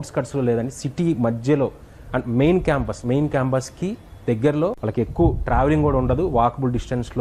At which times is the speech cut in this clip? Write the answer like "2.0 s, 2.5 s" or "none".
4.8 s